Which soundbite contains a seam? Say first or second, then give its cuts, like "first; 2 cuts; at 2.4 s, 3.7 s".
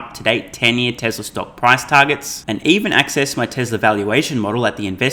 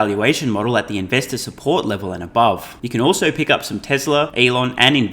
second; 2 cuts; at 2.8 s, 4.3 s